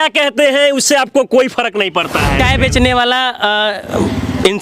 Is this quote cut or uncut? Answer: cut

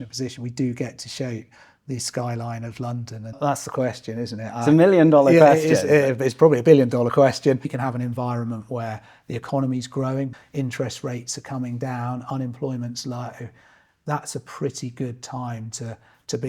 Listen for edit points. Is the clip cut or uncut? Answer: cut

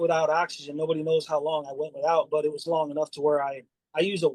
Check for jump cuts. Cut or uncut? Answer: uncut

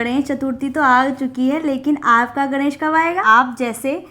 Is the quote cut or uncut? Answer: cut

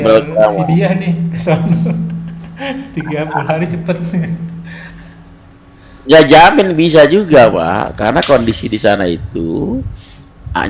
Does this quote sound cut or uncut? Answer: uncut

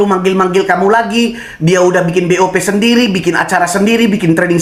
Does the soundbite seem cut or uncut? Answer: uncut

